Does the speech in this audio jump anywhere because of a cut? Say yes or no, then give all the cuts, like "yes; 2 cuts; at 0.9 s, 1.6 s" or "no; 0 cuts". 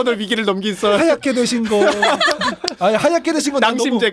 no; 0 cuts